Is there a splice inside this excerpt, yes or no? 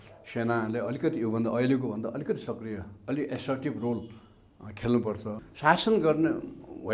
yes